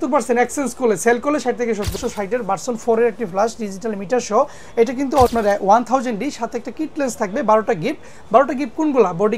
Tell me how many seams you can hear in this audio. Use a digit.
2